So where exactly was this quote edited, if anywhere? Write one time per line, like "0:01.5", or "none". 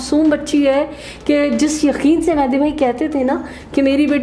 none